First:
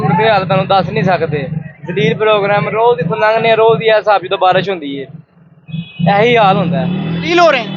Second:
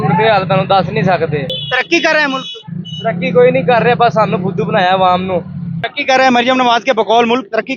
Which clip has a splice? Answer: second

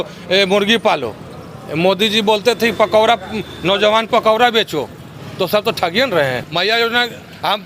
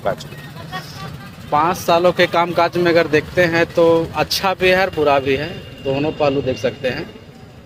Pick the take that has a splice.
first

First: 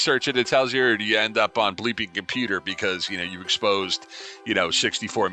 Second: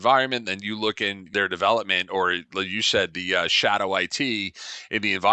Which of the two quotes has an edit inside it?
second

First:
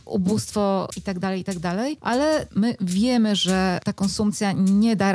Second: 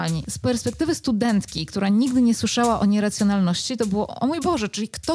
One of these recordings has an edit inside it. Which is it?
first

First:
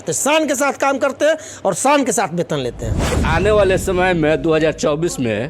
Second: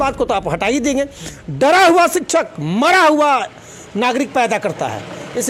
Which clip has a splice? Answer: first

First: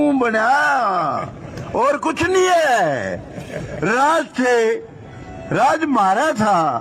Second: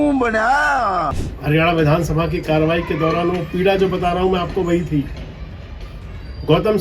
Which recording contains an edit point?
second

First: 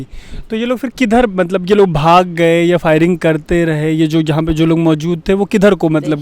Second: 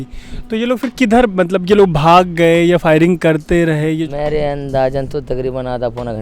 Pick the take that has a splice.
second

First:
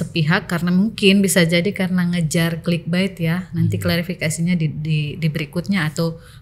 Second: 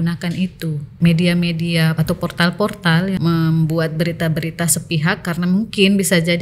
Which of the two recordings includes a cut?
second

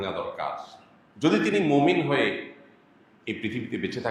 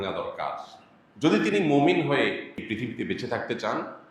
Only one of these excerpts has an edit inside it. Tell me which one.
second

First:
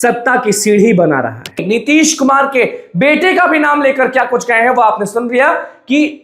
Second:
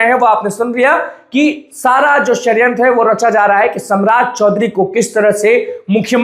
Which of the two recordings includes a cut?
first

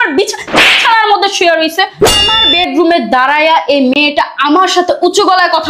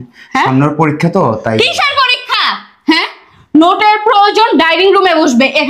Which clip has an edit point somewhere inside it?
first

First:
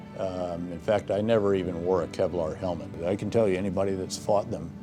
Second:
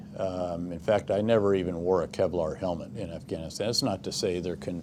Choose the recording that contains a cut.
first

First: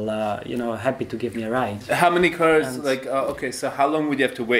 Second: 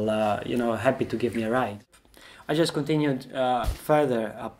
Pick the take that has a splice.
second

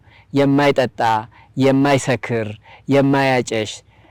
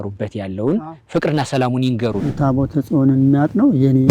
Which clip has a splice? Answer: second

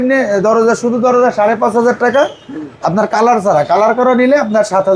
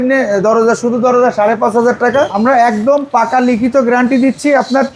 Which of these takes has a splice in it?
second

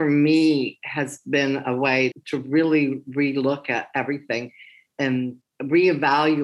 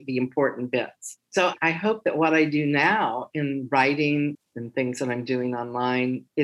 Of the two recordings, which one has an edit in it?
second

